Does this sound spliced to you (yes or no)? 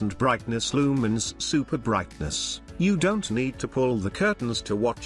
yes